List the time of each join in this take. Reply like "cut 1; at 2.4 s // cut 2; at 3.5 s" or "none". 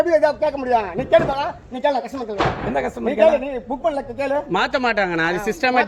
none